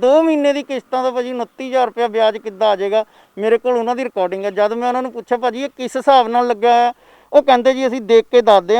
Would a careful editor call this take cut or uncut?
uncut